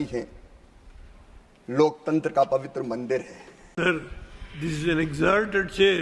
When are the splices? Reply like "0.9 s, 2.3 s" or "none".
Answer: 3.7 s